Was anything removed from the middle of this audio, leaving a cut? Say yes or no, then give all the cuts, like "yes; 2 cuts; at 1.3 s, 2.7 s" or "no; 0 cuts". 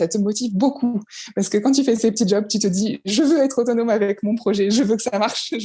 no; 0 cuts